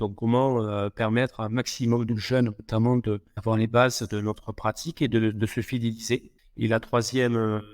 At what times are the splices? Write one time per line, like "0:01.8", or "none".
0:03.3
0:06.4

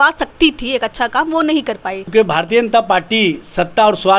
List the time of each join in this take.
0:02.0

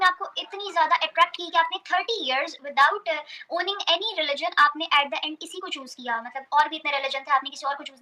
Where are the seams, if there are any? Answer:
none

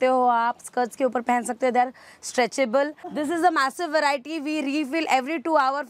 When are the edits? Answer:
0:03.0

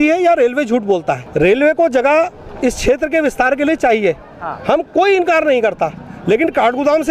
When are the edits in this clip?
0:01.3

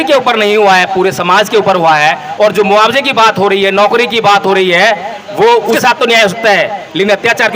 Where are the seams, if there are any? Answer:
0:05.8

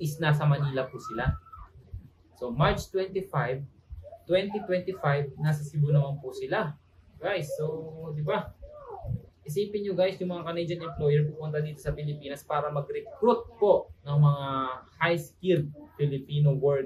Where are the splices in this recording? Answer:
none

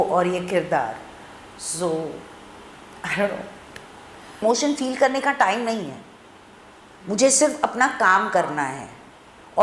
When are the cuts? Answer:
0:04.4

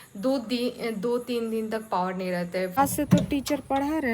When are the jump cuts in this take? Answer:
0:02.7

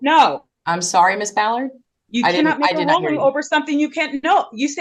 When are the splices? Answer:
none

